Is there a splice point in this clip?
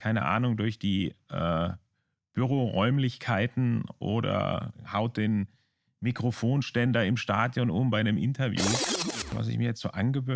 yes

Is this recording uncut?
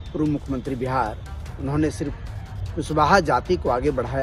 yes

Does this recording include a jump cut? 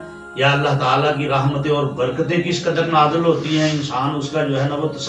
no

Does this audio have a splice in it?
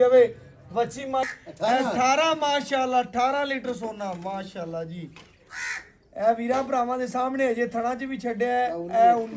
yes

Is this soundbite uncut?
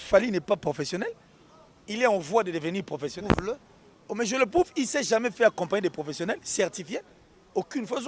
yes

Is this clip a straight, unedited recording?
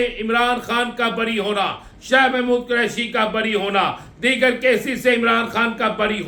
yes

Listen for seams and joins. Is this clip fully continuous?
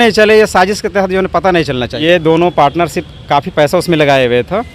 no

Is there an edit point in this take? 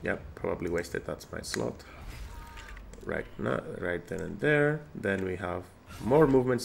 no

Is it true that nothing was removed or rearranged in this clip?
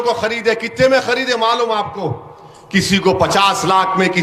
yes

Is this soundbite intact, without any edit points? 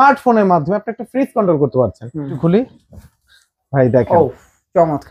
no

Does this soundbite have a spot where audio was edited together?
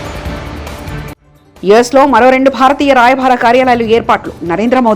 yes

